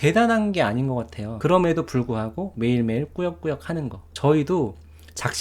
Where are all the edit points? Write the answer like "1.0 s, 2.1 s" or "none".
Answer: 1.3 s, 4.0 s